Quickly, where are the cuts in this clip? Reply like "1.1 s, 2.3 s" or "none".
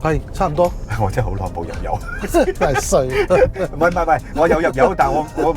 none